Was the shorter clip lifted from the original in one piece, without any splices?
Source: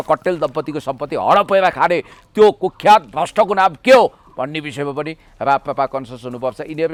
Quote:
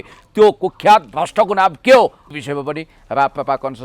no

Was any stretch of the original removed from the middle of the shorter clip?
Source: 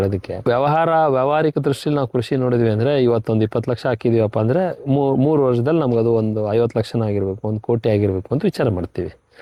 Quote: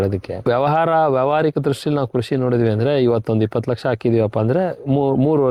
no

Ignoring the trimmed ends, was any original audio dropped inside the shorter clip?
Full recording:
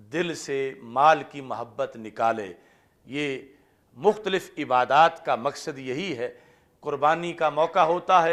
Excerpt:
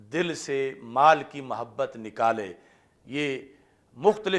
no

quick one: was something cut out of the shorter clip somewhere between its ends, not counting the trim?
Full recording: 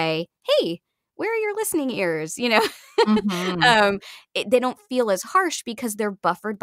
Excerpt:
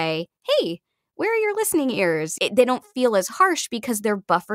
yes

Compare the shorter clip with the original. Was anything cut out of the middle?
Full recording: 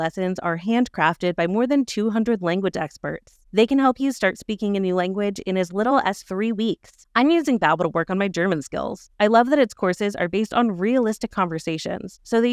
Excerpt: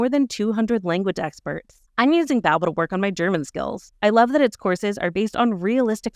yes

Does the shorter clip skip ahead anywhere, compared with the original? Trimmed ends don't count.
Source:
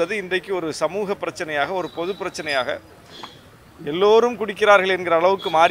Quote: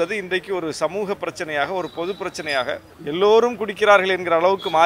yes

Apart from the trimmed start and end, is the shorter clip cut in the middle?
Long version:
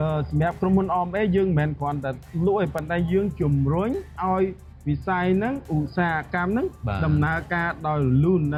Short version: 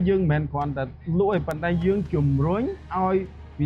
no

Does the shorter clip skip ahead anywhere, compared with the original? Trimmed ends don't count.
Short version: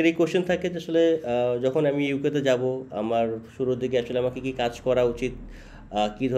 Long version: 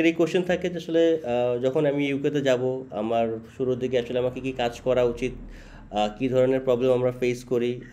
no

